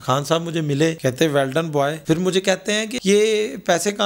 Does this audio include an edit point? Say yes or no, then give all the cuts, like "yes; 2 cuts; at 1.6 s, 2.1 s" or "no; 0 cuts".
yes; 3 cuts; at 1.0 s, 2.0 s, 2.9 s